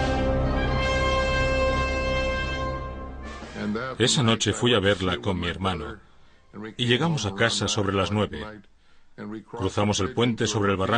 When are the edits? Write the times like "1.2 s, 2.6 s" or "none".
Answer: none